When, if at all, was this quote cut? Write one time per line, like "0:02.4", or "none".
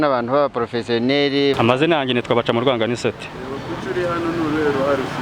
0:01.6